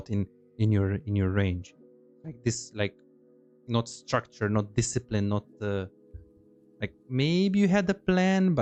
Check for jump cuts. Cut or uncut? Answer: uncut